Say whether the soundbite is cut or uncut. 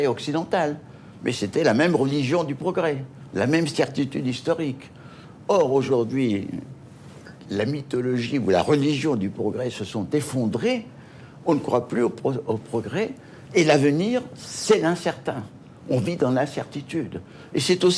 cut